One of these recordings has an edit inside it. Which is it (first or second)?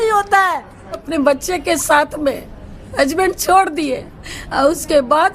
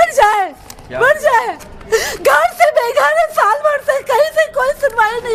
first